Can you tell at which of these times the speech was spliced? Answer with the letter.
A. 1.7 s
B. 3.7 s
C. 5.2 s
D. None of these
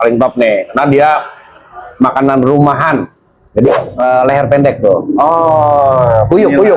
B